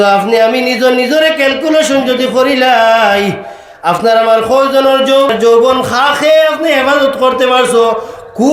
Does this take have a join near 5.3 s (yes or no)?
yes